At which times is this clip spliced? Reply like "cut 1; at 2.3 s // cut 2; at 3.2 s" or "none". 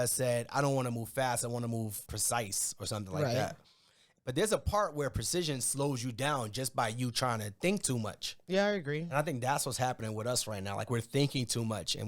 cut 1; at 2.1 s